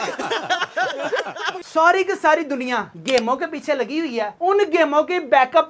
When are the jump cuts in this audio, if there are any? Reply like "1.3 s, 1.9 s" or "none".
1.6 s